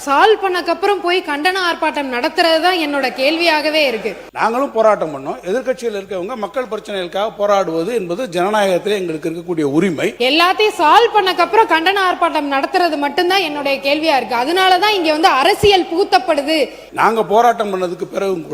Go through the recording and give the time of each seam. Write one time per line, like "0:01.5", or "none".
0:04.2
0:10.1
0:16.9